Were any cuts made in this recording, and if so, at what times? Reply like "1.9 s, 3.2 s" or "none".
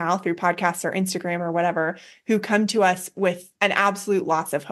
3.5 s